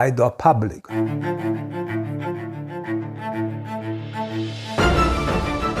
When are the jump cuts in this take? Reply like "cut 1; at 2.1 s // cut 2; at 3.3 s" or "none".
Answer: cut 1; at 1.0 s

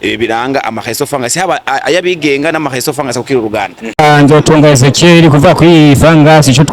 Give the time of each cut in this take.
cut 1; at 3.8 s

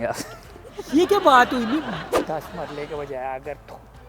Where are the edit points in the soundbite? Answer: cut 1; at 2.1 s

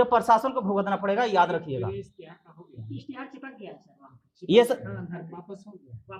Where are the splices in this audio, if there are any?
none

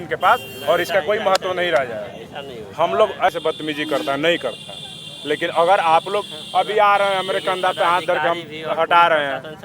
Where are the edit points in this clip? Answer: cut 1; at 3.3 s

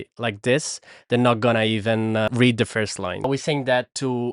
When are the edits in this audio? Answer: cut 1; at 2.3 s // cut 2; at 3.3 s

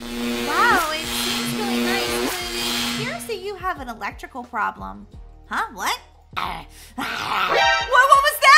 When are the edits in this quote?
cut 1; at 6.3 s

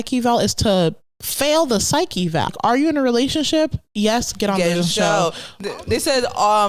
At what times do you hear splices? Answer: cut 1; at 2.6 s

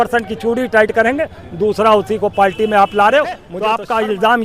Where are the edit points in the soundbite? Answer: cut 1; at 3.5 s

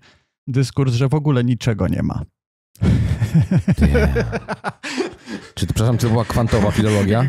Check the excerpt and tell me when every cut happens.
none

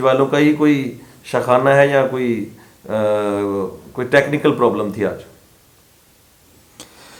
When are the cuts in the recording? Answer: none

